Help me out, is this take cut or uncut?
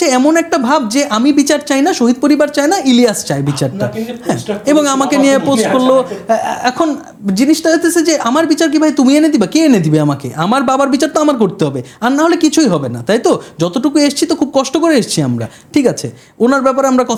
uncut